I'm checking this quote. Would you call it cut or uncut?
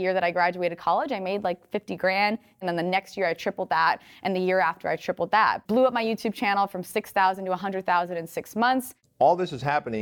cut